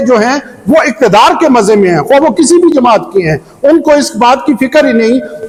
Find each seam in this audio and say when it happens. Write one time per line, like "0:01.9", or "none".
none

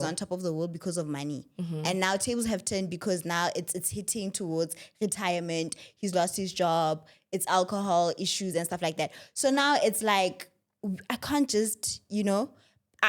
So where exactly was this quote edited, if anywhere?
none

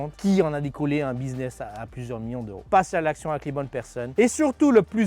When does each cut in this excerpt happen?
none

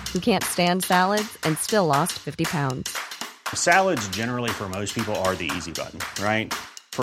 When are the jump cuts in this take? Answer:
none

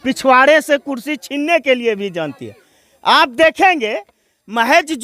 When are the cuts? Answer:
none

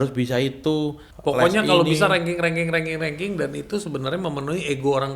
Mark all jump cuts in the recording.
0:01.1

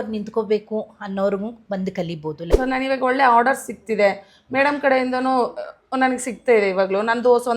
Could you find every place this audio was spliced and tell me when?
0:02.5

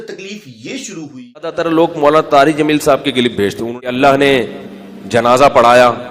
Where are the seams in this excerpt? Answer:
0:01.6
0:03.7

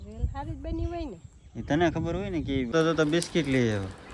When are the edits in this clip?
0:02.7

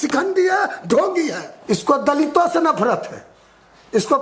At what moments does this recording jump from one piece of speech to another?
0:01.5

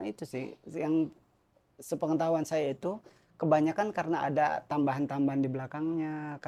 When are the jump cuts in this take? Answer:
none

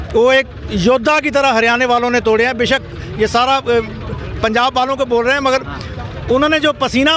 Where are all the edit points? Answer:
none

